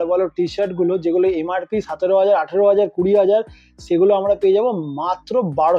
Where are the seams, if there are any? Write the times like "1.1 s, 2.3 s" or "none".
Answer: none